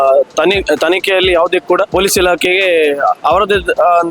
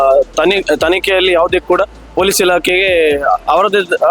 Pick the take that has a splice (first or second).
first